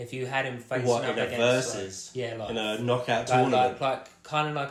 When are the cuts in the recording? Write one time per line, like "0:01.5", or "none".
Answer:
none